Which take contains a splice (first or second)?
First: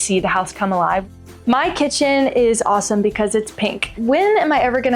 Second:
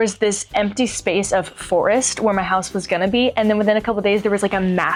first